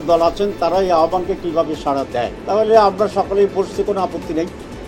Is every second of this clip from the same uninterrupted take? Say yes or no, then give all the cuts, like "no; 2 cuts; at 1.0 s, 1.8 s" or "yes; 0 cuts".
no; 1 cut; at 2.4 s